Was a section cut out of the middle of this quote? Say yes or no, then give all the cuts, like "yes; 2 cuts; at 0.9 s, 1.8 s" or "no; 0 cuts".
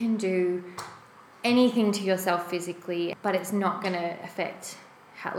yes; 1 cut; at 3.1 s